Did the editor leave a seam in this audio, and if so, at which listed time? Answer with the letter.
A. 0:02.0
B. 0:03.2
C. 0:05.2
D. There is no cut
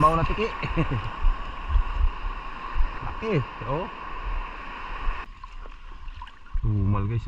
C